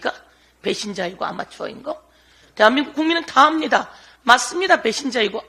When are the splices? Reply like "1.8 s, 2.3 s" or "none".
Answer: none

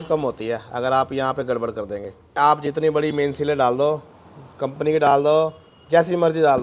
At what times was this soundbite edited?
2.4 s

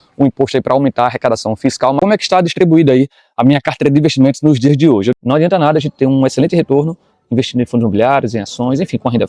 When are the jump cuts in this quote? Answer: 2.0 s, 5.2 s

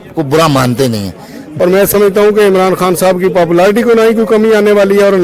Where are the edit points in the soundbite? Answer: 1.4 s

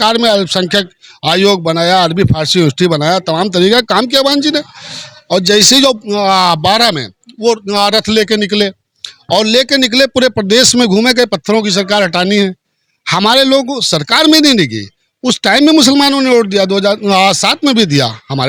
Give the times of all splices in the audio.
none

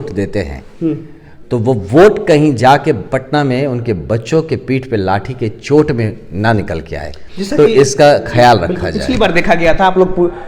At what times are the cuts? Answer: none

